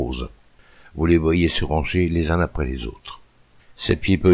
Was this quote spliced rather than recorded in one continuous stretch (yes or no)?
yes